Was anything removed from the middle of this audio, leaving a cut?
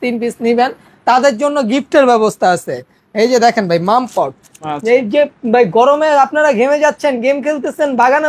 no; 0 cuts

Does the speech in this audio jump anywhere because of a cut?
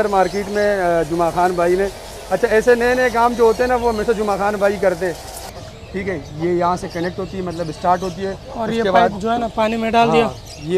yes; 1 cut; at 5.5 s

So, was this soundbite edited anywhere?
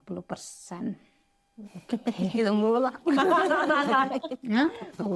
no; 0 cuts

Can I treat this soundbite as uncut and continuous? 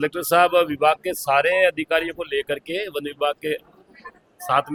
yes; 0 cuts

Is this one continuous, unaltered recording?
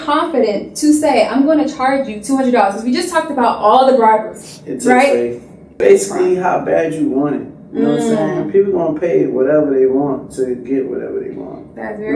no; 1 cut; at 5.7 s

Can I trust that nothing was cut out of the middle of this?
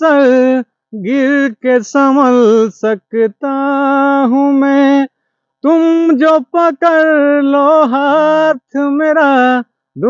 yes; 0 cuts

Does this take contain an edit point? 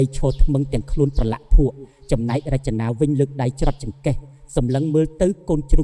no; 0 cuts

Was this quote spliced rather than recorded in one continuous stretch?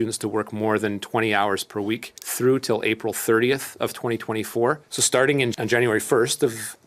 yes; 1 cut; at 4.9 s

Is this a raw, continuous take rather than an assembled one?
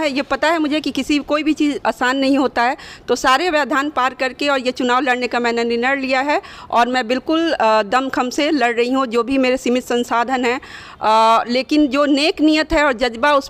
yes; 0 cuts

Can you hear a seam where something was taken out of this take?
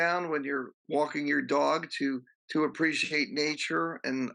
yes; 1 cut; at 2.3 s

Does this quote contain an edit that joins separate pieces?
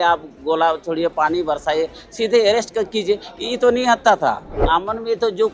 yes; 1 cut; at 4.5 s

